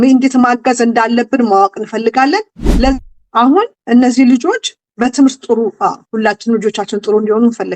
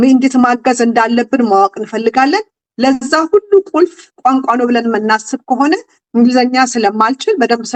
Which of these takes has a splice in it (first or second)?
first